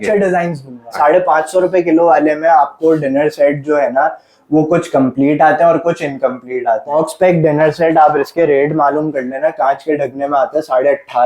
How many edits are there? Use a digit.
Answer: 2